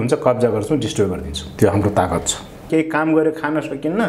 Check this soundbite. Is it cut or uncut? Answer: cut